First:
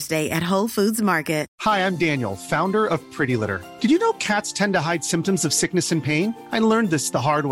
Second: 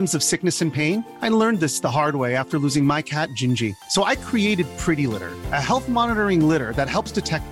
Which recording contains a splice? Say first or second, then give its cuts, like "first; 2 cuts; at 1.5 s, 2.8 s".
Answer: first; 1 cut; at 1.5 s